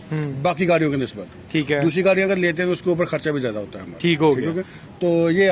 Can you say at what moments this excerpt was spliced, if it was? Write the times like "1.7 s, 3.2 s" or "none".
none